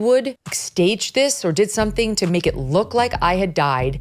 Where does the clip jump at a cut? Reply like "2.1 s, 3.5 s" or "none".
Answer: none